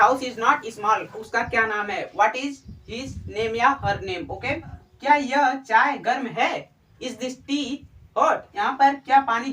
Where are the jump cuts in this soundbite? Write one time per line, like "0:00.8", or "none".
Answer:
0:01.2
0:04.9
0:08.5